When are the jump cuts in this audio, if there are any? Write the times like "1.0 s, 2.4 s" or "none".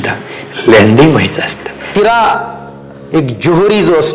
1.9 s